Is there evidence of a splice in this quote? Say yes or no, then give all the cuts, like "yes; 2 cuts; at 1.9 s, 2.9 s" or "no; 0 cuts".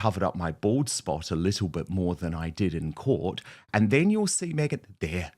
no; 0 cuts